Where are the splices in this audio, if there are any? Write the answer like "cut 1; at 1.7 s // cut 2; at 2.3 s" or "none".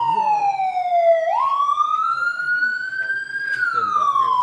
cut 1; at 1.6 s